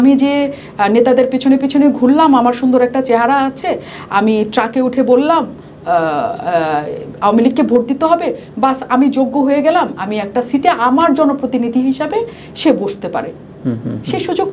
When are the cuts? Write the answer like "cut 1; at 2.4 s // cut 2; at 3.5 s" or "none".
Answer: none